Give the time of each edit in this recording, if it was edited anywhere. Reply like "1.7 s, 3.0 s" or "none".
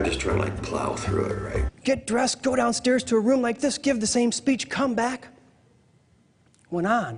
none